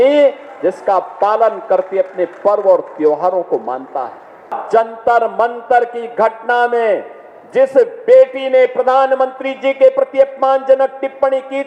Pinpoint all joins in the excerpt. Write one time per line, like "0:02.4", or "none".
0:04.6